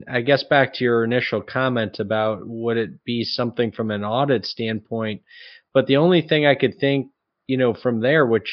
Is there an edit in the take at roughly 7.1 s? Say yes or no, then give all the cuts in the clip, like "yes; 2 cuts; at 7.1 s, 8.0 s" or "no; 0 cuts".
no; 0 cuts